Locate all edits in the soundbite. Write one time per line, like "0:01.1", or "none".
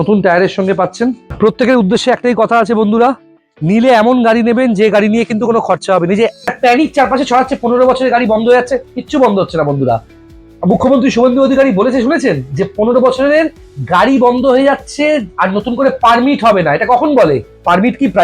0:01.2
0:06.4